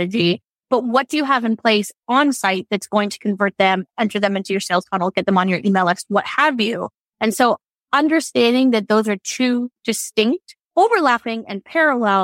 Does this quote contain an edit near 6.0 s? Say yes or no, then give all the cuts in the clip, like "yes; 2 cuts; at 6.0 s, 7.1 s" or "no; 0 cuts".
no; 0 cuts